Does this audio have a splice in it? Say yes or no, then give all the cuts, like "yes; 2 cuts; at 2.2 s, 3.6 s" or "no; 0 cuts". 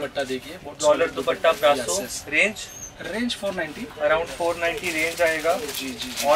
no; 0 cuts